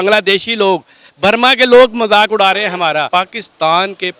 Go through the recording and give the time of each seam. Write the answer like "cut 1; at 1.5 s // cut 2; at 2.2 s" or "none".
cut 1; at 3.1 s